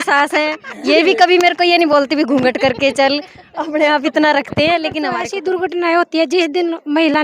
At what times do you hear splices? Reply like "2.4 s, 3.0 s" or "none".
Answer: 5.3 s